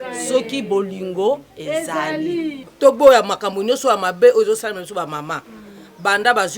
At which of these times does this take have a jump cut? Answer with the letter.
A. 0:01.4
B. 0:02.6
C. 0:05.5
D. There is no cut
B